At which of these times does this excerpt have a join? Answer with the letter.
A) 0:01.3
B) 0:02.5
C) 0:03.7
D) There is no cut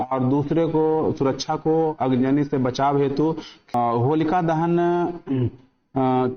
C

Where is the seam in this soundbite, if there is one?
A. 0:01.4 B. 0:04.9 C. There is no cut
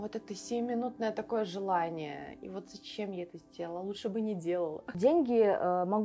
B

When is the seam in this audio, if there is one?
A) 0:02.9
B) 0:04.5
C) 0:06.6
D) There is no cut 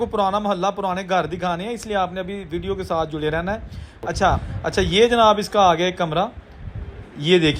B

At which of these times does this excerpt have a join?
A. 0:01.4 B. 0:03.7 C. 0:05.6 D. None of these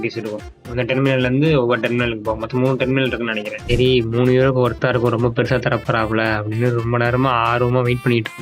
B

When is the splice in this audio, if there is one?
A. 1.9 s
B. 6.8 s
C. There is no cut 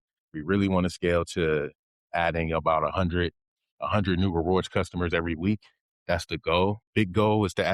B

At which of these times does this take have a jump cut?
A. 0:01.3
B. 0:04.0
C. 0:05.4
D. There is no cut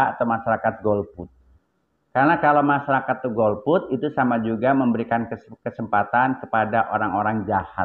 D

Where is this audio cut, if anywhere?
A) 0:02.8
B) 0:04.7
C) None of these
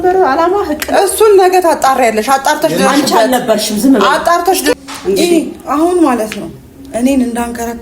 B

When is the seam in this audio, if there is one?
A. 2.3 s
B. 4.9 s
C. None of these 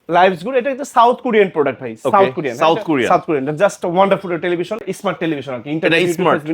B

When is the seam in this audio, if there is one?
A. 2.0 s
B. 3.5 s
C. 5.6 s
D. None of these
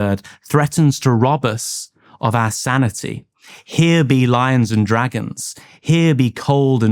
D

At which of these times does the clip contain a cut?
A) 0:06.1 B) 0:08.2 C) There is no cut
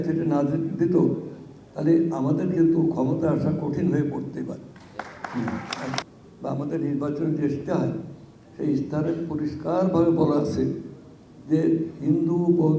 A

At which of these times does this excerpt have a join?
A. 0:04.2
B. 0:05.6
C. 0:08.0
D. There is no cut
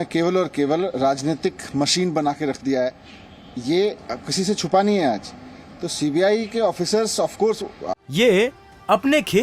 C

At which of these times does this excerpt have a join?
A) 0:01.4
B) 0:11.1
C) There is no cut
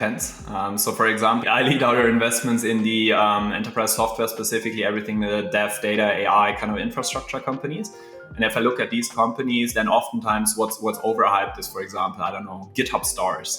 A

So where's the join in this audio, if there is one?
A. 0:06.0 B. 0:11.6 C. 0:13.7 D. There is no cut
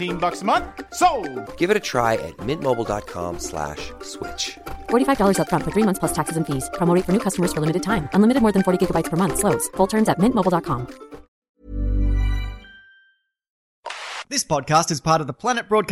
C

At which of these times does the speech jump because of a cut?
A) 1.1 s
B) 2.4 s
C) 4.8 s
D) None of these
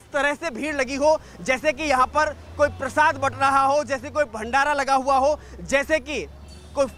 D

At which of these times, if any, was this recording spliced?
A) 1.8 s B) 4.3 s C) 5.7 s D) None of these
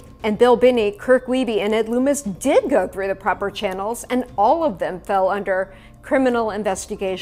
D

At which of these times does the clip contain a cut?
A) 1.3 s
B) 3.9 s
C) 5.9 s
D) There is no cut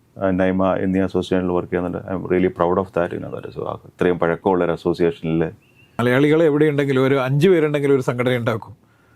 C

